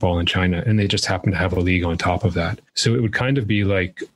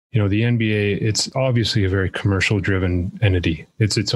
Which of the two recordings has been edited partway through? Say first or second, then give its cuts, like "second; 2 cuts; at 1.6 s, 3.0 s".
first; 1 cut; at 2.6 s